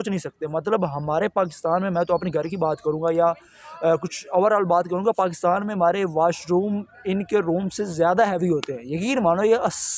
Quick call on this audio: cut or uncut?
uncut